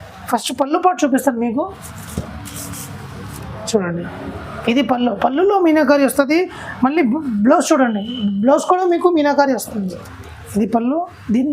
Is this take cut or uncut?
cut